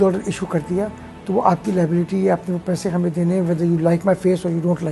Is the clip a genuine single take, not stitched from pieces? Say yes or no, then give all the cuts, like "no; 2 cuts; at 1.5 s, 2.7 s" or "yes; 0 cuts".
yes; 0 cuts